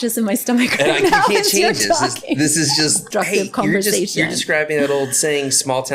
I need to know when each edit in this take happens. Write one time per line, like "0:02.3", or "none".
0:03.1